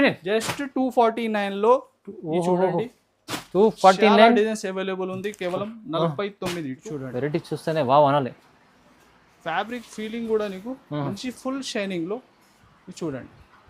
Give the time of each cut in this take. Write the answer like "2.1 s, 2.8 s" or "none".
6.8 s